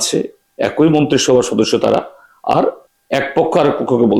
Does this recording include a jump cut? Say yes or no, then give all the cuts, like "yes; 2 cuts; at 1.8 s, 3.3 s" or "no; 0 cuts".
yes; 1 cut; at 2.9 s